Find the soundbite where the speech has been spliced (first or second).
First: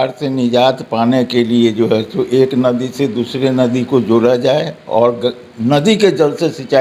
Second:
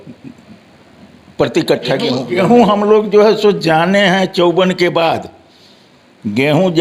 second